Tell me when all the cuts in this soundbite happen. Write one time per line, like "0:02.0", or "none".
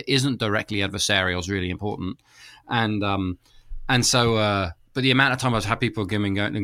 none